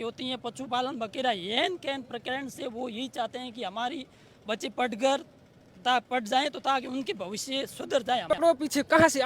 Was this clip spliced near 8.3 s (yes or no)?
yes